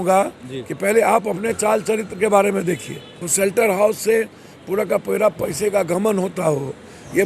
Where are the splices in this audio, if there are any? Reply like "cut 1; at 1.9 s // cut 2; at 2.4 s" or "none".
cut 1; at 3.2 s